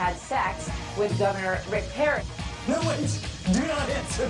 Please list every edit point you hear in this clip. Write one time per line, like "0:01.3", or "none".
0:01.5